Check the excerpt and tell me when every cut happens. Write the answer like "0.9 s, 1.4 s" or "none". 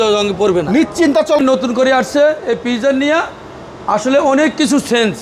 1.4 s